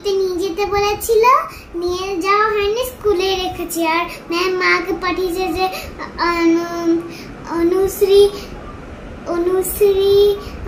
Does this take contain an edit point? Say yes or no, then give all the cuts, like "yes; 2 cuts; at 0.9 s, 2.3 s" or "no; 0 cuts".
no; 0 cuts